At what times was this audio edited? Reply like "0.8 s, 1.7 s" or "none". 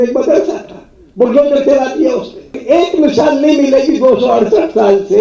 2.6 s